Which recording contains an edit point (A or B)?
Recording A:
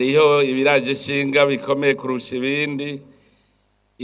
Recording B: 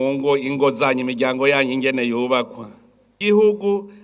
B